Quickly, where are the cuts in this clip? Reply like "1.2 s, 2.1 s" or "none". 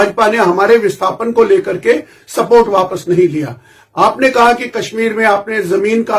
none